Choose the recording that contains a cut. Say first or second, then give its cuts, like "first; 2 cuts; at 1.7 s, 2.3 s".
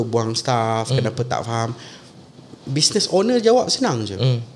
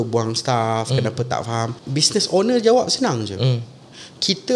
second; 1 cut; at 1.8 s